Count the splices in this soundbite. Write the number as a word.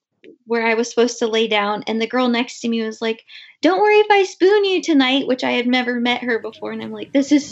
zero